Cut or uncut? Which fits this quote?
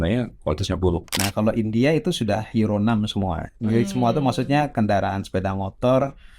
cut